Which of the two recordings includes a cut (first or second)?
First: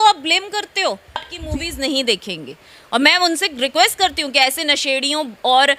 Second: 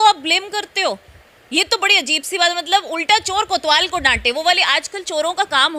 first